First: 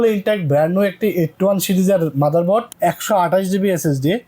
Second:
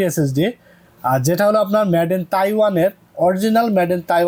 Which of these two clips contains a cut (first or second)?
first